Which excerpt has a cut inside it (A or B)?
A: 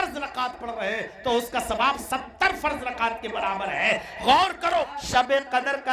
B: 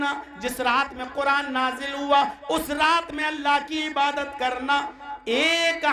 A